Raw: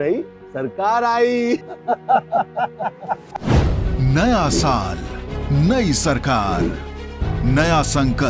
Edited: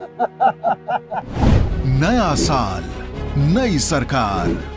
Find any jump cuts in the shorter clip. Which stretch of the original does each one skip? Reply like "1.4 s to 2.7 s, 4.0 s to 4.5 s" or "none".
3.3 s to 3.7 s